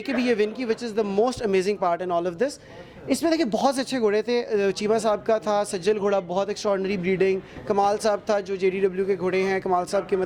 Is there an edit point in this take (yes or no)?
no